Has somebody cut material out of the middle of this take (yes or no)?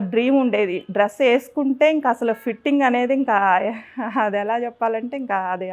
no